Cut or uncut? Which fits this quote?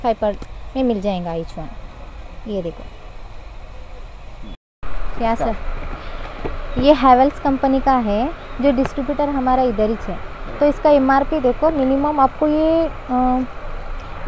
cut